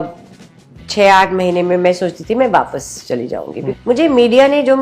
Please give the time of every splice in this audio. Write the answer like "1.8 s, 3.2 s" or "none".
3.1 s